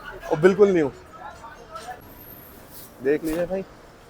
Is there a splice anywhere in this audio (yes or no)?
yes